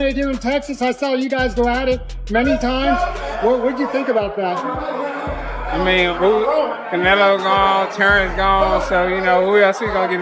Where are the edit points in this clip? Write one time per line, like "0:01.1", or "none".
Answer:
none